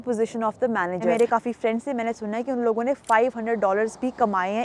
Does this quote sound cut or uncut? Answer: cut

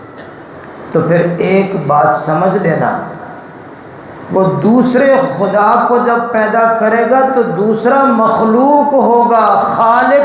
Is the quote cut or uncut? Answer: uncut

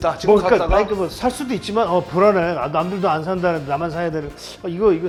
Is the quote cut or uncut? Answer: uncut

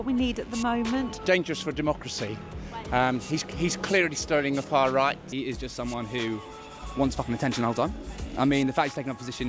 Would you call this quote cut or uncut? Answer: cut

